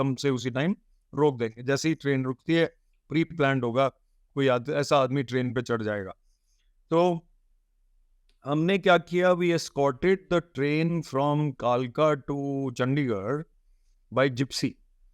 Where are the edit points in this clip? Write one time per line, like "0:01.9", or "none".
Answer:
none